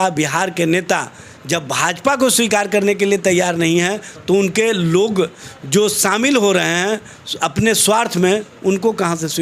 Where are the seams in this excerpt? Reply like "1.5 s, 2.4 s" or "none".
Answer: none